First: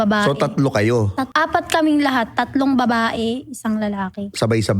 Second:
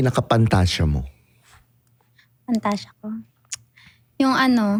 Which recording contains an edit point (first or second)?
first